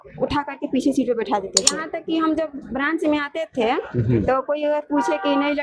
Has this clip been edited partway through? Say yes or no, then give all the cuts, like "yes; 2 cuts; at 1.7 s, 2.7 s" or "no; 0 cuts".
yes; 1 cut; at 1.8 s